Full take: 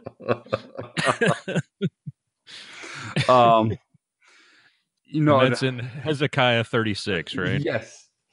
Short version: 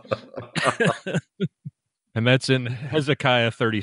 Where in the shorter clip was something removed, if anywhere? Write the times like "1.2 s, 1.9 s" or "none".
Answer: 2.3 s

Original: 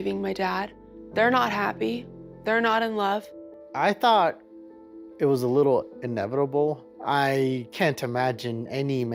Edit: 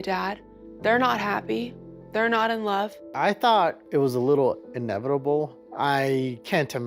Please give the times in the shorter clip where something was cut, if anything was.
3.0 s, 3.8 s

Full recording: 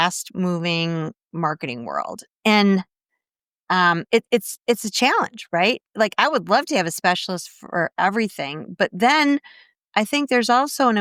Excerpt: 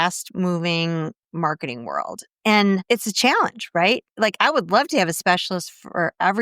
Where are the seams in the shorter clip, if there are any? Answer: 2.8 s

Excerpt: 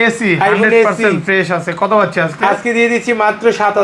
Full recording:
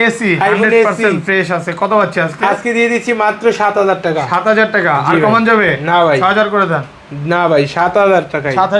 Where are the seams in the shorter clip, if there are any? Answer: none

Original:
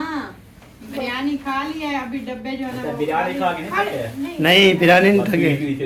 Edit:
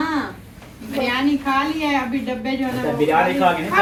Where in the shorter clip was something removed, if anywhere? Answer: none

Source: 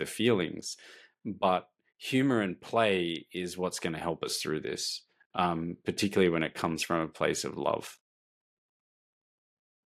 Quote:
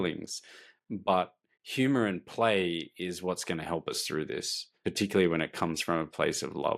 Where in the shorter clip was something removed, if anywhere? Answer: 4.8 s

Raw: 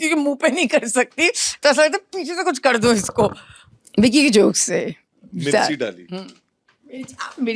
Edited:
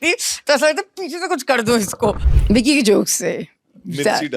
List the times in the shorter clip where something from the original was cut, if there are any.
2.3 s

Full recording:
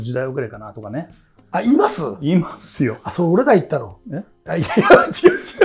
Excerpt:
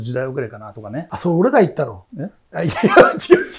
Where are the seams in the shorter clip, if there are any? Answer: 1.1 s

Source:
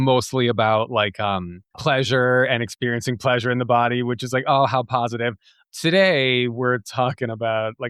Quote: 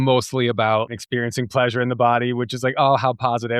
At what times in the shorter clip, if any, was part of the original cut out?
0.9 s

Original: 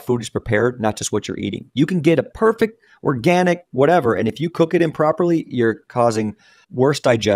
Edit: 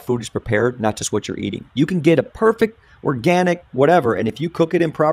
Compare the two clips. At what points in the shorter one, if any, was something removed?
none

